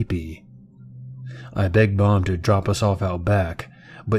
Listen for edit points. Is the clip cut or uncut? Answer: cut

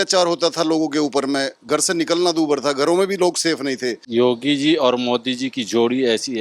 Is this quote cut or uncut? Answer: cut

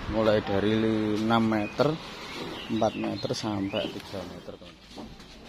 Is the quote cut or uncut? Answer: cut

